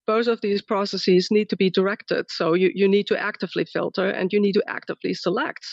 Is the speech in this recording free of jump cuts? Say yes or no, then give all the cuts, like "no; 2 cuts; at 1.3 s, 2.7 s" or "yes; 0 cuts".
yes; 0 cuts